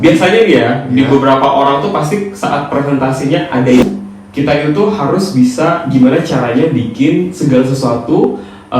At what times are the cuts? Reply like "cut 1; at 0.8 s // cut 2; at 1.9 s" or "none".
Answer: cut 1; at 3.8 s